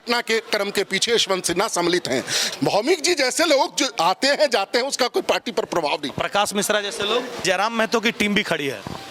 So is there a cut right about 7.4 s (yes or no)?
yes